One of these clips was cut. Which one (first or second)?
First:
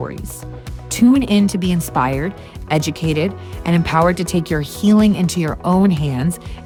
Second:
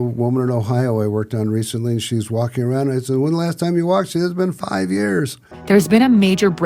second